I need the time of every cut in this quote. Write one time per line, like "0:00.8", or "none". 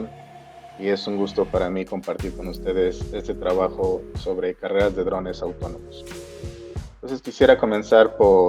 none